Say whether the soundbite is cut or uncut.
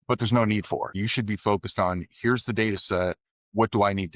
cut